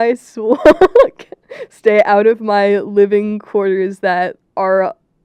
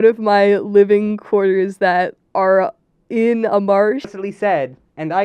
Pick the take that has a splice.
second; 1 cut; at 4.1 s

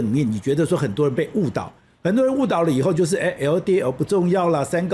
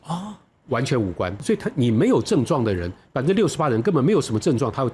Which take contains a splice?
second; 1 cut; at 1.4 s

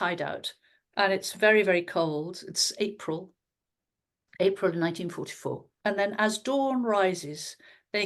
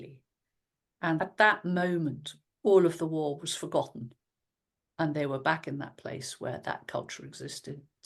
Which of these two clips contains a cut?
second; 1 cut; at 1.2 s

